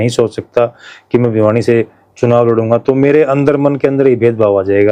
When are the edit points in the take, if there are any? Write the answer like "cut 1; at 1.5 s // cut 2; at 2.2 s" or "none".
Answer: none